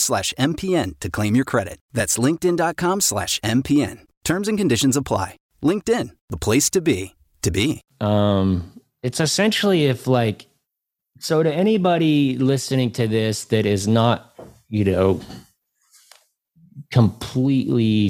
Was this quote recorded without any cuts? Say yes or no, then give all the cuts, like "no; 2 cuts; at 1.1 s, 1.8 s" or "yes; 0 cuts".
yes; 0 cuts